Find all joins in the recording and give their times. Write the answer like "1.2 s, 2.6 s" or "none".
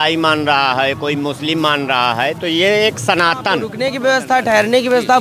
3.7 s